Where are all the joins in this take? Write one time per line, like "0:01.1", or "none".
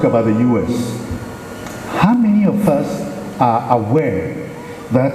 none